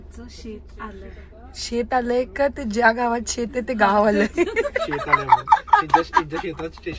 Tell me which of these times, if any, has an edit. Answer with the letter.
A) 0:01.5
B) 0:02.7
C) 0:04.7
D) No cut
D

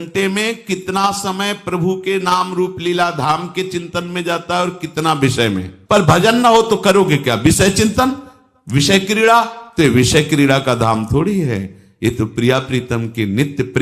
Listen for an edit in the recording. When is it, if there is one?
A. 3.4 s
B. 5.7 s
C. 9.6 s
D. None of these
B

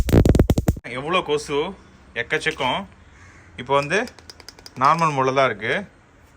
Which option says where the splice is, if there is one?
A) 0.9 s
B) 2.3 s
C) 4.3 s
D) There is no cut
A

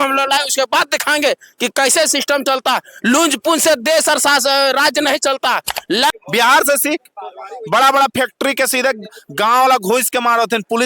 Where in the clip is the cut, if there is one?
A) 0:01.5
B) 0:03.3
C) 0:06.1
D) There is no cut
C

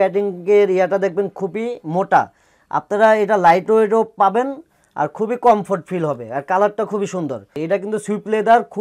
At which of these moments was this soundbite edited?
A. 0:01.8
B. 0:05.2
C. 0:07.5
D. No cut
C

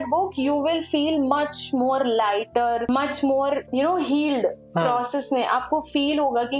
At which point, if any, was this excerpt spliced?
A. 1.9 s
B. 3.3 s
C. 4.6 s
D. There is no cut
D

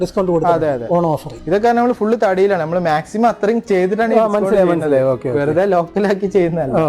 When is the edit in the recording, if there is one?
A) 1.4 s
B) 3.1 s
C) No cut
C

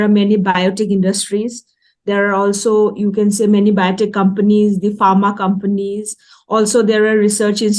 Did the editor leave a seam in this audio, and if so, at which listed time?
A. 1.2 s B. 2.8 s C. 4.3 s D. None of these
D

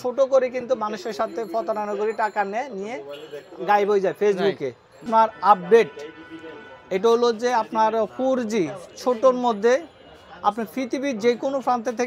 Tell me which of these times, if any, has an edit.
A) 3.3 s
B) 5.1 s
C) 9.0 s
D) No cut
B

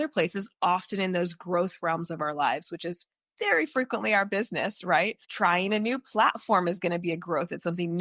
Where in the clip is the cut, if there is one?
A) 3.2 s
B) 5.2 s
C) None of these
B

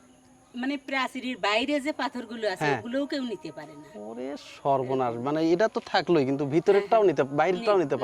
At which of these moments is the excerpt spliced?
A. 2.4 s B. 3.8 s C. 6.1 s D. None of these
D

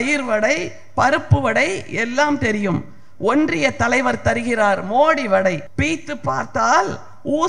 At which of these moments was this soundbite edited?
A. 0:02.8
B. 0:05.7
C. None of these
B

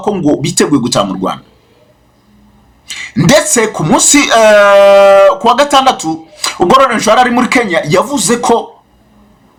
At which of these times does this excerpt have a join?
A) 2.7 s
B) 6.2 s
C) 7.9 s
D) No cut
D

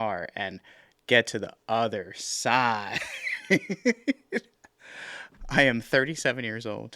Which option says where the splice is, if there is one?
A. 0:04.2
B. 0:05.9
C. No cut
C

